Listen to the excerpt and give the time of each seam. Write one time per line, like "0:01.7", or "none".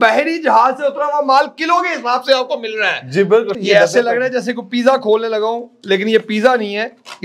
0:03.5